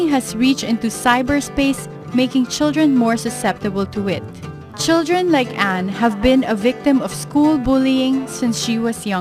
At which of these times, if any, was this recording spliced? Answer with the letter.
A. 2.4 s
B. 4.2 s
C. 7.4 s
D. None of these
B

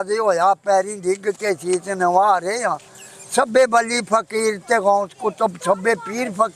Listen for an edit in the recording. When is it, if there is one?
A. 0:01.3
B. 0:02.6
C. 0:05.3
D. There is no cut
D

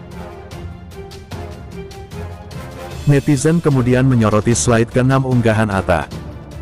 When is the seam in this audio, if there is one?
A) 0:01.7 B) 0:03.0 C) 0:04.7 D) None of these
B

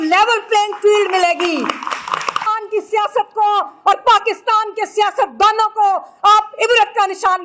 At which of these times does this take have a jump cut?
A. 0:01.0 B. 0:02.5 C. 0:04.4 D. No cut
B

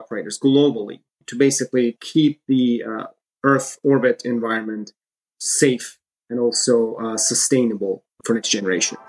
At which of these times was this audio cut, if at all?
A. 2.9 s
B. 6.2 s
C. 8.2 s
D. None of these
C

